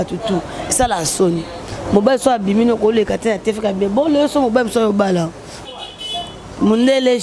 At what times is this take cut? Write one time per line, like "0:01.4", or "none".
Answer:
0:05.7